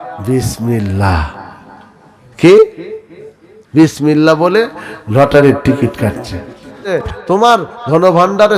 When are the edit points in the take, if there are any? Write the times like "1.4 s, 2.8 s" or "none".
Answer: 6.9 s

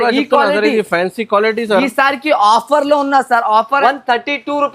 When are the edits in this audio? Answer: 3.8 s

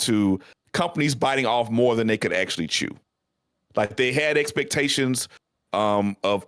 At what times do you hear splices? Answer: none

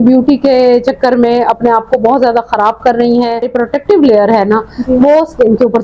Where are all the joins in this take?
3.6 s

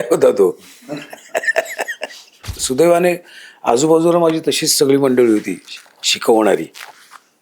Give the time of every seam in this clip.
2.6 s

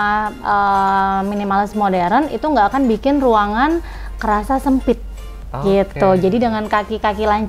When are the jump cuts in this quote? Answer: none

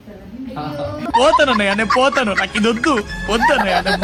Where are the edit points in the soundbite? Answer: none

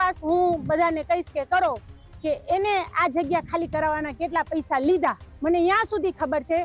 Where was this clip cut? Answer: 5.3 s

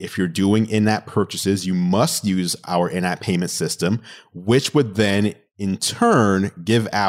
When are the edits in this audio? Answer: none

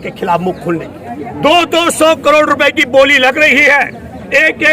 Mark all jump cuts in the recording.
1.0 s

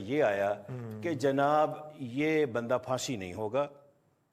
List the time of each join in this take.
none

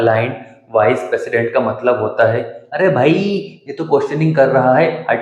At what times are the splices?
none

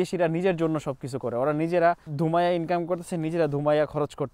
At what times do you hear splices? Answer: 2.1 s

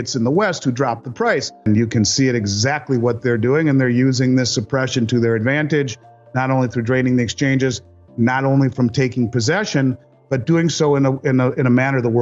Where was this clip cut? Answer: 1.6 s

